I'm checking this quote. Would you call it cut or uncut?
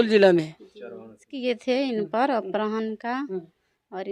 cut